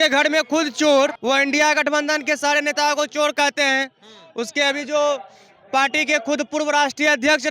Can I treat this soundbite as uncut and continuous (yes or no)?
no